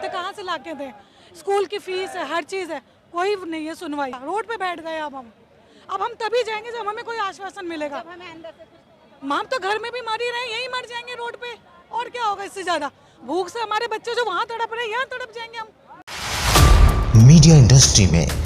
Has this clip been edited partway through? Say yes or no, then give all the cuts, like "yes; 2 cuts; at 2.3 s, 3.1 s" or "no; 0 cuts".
yes; 2 cuts; at 4.2 s, 15.9 s